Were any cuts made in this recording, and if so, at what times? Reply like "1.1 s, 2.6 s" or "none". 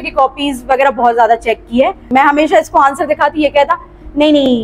2.0 s

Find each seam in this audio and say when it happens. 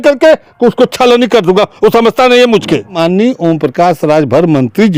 2.9 s

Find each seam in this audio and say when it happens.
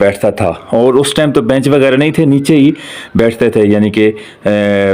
none

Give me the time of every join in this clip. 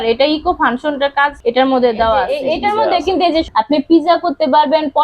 1.4 s, 2.3 s, 3.5 s

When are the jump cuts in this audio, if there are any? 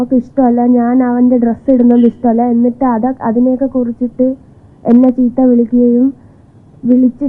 none

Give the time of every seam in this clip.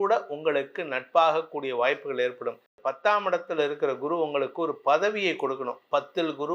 2.7 s

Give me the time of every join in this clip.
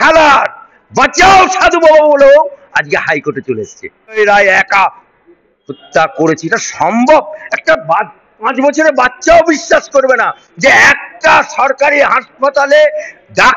4.1 s

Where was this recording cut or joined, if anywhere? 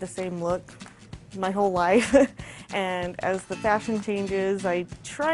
none

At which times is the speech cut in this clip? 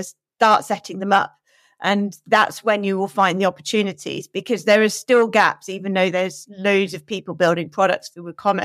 none

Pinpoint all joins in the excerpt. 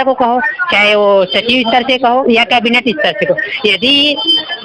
none

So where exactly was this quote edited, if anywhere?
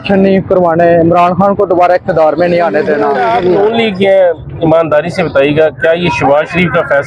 3.1 s

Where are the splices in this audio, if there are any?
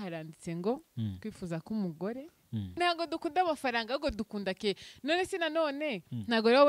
2.8 s

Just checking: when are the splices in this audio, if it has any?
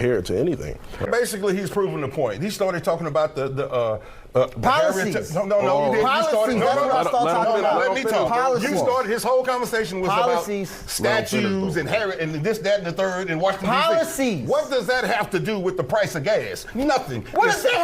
1.1 s

